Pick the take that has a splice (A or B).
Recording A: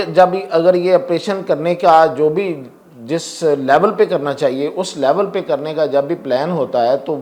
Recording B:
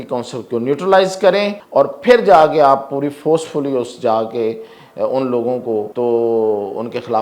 B